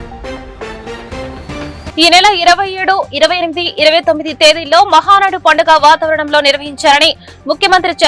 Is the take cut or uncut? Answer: cut